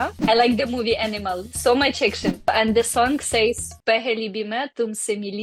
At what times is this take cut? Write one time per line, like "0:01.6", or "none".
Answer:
0:02.5